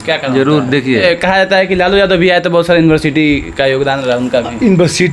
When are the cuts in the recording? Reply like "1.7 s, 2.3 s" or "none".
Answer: 1.0 s